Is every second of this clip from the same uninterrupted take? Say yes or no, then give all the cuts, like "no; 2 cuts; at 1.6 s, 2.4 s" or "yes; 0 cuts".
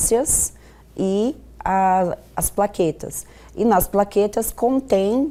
yes; 0 cuts